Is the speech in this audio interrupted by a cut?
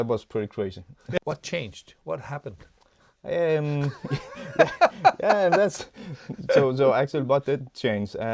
yes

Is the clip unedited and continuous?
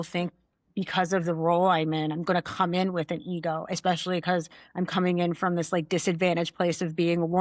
yes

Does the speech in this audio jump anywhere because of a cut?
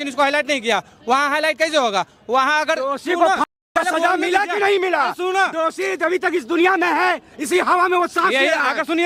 no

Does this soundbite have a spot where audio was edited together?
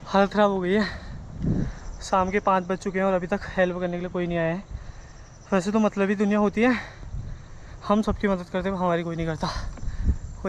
no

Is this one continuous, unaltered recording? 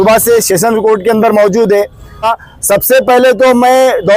no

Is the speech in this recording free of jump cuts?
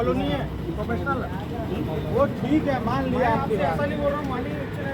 yes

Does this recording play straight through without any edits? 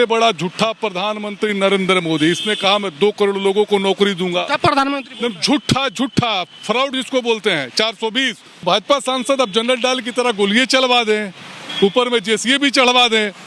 no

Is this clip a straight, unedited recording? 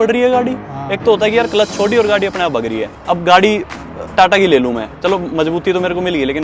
no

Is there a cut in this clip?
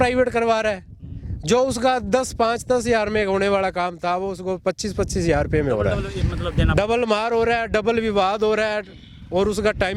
no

